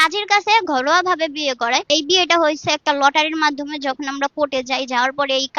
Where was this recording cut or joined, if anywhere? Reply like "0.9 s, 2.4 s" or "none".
1.9 s

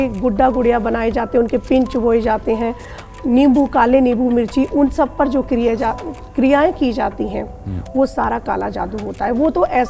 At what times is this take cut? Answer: none

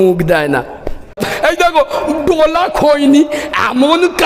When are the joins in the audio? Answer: 1.3 s

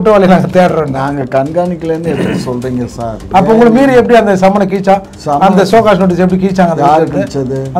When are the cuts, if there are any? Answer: none

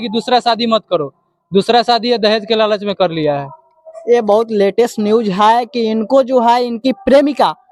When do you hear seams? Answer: none

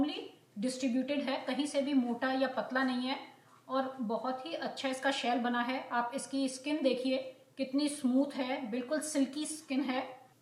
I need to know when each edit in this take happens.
none

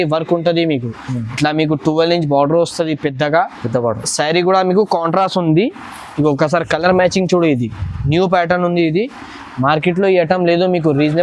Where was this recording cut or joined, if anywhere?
none

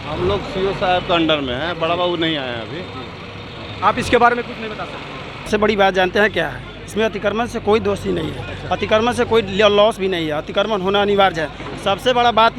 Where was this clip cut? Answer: 5.5 s

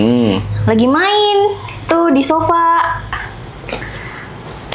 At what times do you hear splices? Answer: none

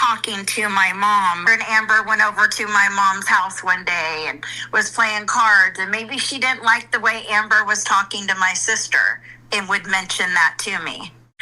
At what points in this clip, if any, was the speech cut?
1.4 s

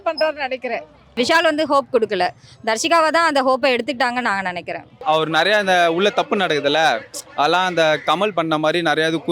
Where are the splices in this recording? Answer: 1.1 s, 5.0 s

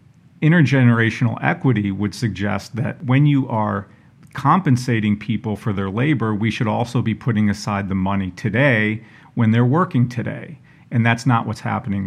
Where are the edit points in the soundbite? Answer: 2.9 s

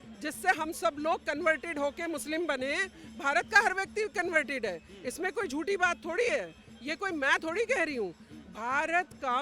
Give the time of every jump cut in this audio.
none

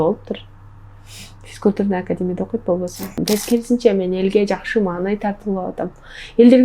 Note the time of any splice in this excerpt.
3.2 s

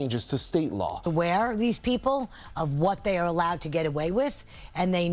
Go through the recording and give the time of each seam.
1.0 s

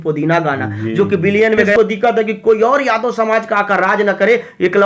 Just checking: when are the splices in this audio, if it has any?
1.8 s

